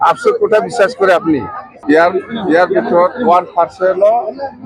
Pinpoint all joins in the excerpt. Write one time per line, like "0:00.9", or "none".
0:01.7